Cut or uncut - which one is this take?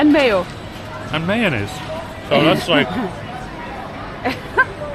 uncut